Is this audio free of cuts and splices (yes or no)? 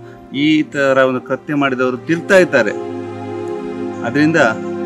yes